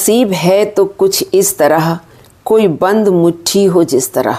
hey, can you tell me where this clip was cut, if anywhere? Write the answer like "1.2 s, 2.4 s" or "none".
none

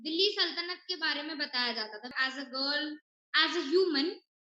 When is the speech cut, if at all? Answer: 2.1 s

